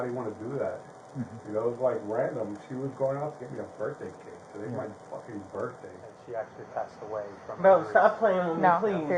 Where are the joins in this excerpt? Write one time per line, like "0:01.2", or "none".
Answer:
0:06.1